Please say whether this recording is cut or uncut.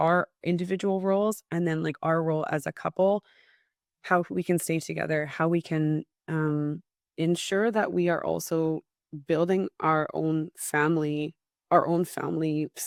uncut